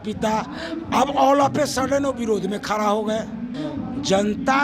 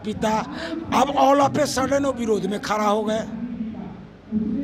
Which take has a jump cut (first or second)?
first